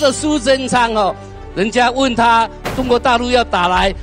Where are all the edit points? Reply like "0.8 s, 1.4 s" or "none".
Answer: 1.3 s